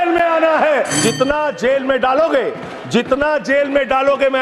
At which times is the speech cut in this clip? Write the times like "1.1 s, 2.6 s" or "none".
0.9 s